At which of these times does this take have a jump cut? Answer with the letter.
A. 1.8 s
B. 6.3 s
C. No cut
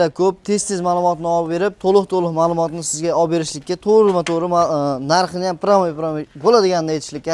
C